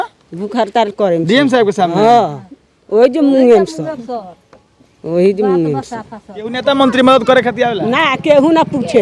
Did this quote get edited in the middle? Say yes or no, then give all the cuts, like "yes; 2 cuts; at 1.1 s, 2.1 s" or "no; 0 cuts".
yes; 1 cut; at 6.6 s